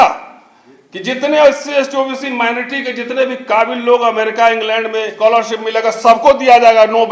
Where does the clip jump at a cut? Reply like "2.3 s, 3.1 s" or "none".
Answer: 5.1 s